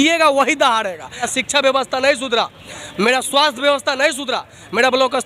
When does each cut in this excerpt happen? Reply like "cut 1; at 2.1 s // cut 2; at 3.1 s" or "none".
cut 1; at 1.3 s